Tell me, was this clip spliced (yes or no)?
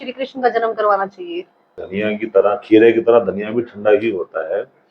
yes